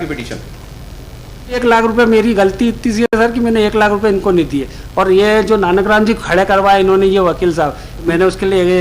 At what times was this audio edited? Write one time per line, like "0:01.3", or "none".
0:01.6
0:07.9